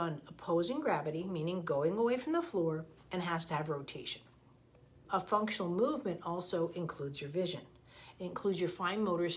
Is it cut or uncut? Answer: cut